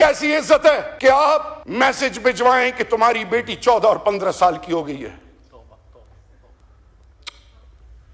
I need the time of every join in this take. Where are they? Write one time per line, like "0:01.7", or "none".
0:00.9
0:01.6